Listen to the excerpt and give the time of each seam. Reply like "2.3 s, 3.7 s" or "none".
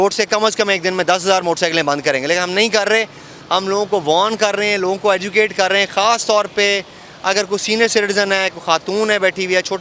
none